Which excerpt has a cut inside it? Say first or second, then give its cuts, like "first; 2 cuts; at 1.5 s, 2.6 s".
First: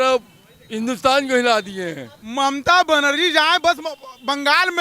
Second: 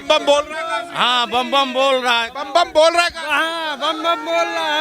first; 1 cut; at 2.2 s